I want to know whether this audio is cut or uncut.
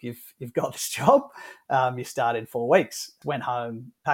cut